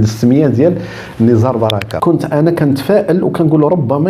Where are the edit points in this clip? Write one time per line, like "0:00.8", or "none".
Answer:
0:01.9